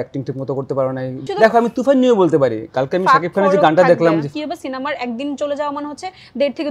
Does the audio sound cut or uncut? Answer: cut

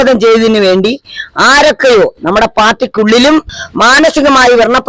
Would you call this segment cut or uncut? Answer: cut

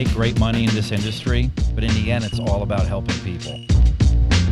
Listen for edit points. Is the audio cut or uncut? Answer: uncut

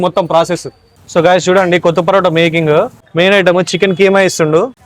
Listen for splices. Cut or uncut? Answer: cut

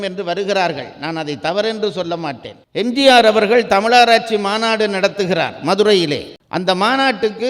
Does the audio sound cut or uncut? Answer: cut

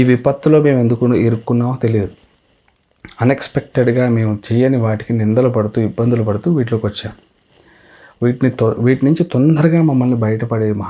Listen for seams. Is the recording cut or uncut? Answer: uncut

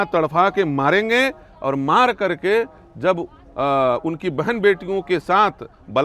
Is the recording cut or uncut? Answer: uncut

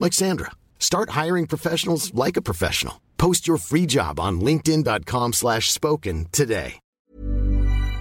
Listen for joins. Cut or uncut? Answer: cut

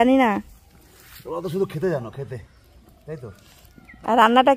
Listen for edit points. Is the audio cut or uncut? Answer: uncut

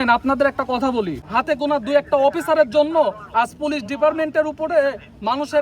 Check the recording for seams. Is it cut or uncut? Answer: cut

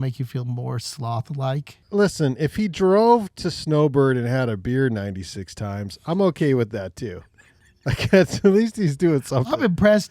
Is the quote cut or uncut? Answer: cut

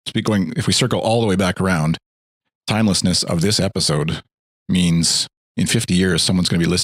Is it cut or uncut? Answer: uncut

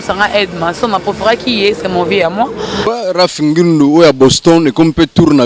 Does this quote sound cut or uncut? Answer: cut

